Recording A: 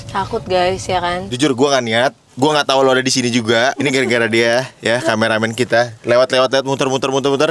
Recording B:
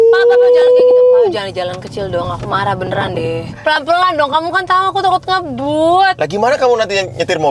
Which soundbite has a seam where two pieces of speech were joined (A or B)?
A